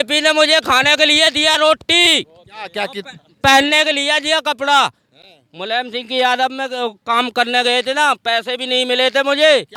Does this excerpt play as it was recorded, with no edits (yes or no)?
yes